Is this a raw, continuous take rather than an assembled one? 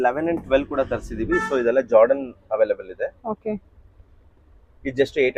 yes; 0 cuts

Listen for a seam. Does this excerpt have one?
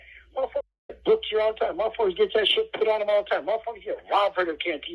no; 0 cuts

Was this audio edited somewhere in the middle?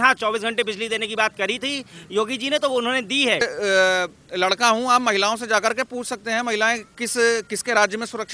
yes; 1 cut; at 3.4 s

